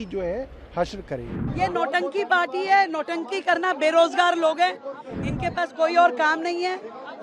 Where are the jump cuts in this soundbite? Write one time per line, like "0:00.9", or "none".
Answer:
0:01.4